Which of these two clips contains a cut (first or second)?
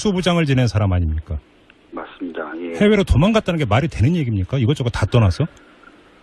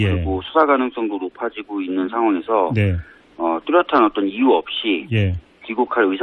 second